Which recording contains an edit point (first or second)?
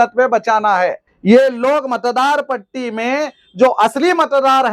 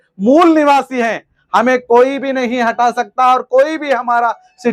first